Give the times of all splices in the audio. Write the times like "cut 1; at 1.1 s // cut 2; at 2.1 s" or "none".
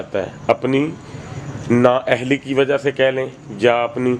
none